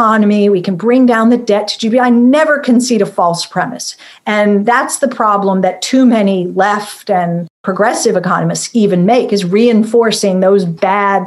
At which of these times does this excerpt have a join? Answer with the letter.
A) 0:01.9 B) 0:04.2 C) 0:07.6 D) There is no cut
C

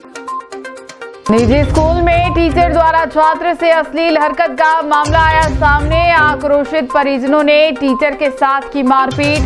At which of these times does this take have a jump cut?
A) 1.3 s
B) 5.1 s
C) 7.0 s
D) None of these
A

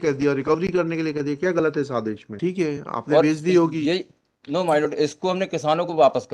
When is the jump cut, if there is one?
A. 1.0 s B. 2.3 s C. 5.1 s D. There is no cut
B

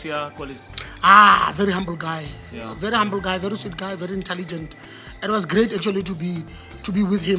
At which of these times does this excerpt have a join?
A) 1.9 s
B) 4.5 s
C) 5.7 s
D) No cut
D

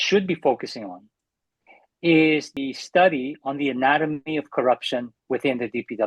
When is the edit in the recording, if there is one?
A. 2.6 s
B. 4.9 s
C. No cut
A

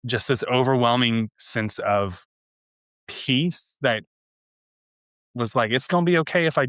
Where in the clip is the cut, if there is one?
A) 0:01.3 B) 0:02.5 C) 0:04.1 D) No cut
D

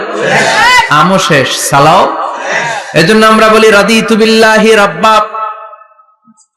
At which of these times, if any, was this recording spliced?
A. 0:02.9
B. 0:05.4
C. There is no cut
C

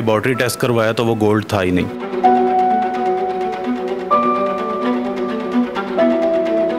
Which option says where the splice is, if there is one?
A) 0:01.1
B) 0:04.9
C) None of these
C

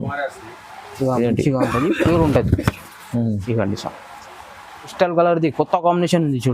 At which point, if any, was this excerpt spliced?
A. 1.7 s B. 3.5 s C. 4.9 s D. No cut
C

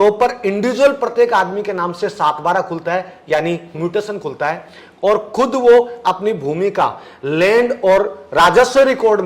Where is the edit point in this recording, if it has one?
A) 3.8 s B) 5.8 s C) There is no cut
A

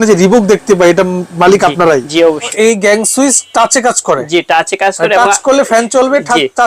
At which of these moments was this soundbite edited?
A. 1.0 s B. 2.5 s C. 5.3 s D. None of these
B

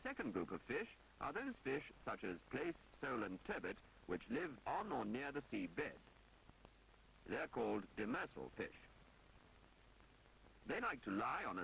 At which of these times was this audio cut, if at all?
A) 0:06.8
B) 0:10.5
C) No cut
B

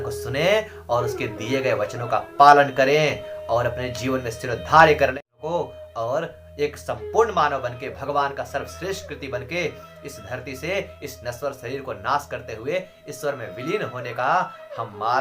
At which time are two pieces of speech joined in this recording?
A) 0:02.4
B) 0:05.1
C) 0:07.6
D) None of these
B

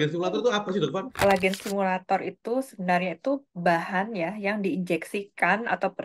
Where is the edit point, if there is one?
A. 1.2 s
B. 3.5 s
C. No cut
A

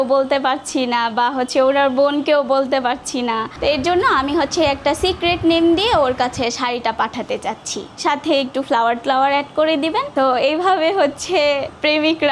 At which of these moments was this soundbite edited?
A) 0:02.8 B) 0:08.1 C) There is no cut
C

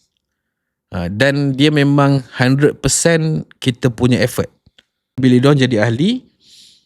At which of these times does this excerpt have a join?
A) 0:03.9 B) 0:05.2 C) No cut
B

